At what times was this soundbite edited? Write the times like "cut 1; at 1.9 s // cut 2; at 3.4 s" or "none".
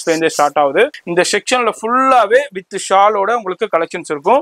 cut 1; at 1.0 s